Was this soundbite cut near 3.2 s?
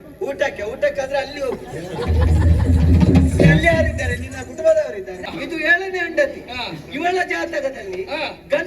no; 1 cut; at 5.3 s

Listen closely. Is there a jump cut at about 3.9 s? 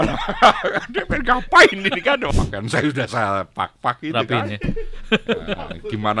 no; 1 cut; at 2.3 s

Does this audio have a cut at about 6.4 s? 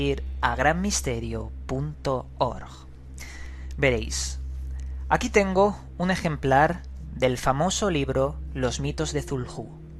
yes; 1 cut; at 6.4 s

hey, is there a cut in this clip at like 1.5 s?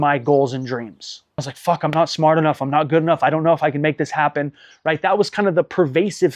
yes; 1 cut; at 1.5 s

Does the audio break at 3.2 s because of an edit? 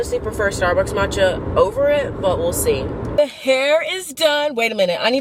yes; 1 cut; at 3.2 s

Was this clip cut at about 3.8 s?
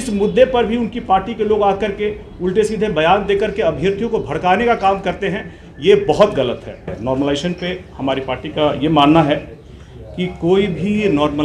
no; 1 cut; at 6.9 s

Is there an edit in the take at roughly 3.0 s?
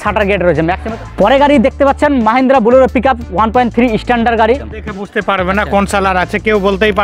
no; 2 cuts; at 0.8 s, 4.7 s

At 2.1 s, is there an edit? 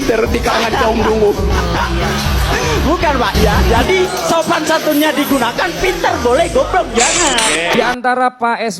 no; 2 cuts; at 3.6 s, 7.7 s

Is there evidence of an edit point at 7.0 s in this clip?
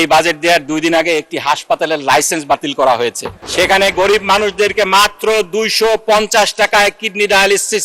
no; 1 cut; at 3.3 s

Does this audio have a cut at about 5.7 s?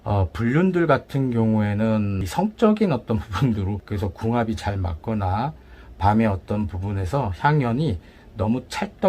no; 2 cuts; at 2.2 s, 3.8 s

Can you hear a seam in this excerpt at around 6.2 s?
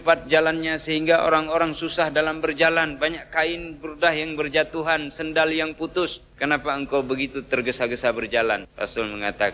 yes; 2 cuts; at 6.2 s, 8.7 s

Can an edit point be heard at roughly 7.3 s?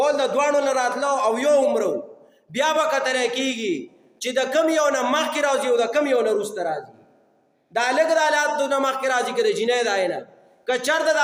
no; 0 cuts

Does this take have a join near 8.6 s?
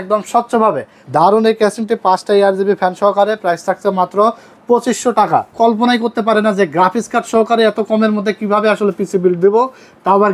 no; 2 cuts; at 0.9 s, 5.5 s

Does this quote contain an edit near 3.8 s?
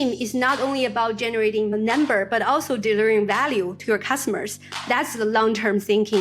no; 1 cut; at 1.7 s

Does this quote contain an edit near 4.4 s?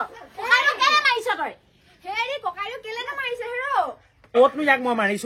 yes; 1 cut; at 4.4 s

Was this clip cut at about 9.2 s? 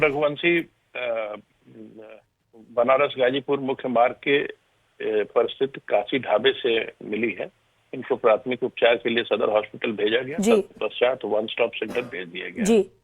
yes; 1 cut; at 9.2 s

